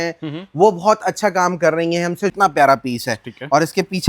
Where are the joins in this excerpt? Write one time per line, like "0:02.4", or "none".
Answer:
0:02.3